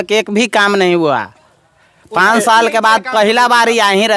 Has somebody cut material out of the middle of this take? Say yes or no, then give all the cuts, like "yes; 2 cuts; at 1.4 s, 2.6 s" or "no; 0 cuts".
no; 0 cuts